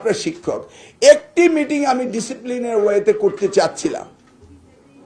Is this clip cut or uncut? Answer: uncut